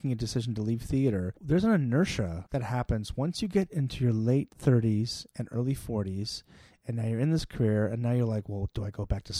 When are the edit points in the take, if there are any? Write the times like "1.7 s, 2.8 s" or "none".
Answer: 1.3 s, 2.4 s

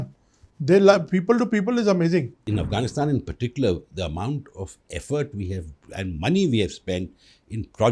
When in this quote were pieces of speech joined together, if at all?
2.4 s

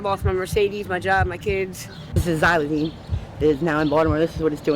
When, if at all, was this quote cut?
2.2 s

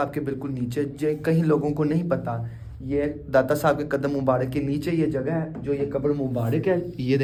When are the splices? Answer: none

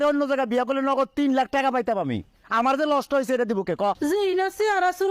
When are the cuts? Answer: 4.0 s

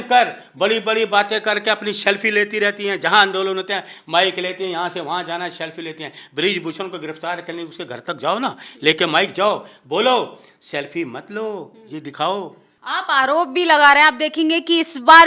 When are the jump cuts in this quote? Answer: none

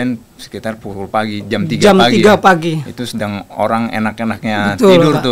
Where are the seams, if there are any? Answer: none

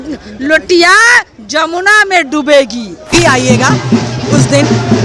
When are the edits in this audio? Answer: 3.1 s

